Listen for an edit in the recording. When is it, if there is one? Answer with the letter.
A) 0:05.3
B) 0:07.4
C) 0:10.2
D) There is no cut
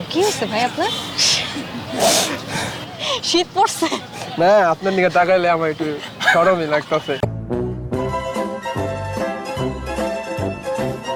D